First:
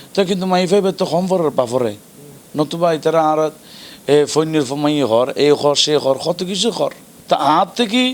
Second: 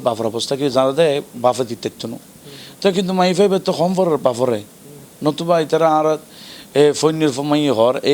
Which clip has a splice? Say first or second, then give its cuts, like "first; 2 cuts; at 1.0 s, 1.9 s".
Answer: first; 1 cut; at 7.1 s